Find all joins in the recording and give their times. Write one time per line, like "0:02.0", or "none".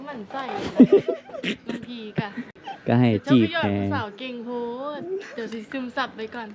none